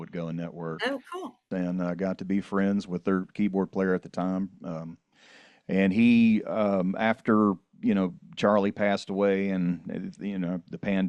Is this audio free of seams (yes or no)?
no